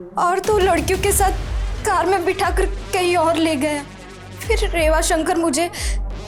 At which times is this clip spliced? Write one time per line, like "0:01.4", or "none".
none